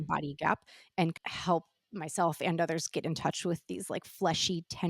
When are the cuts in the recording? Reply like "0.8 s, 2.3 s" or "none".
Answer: 1.2 s

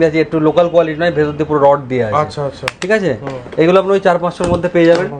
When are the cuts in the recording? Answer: none

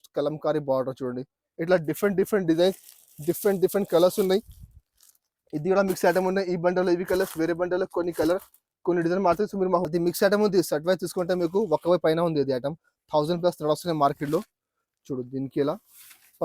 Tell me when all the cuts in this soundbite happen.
1.4 s, 9.8 s

